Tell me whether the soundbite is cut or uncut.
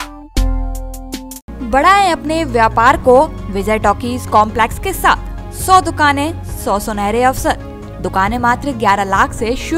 uncut